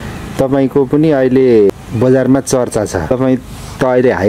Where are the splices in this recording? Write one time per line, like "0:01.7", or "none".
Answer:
0:01.7
0:03.1